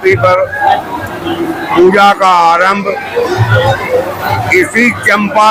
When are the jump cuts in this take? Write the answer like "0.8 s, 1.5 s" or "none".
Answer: none